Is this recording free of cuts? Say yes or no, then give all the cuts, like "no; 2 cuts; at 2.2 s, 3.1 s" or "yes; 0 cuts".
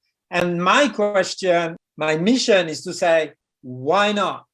no; 1 cut; at 1.8 s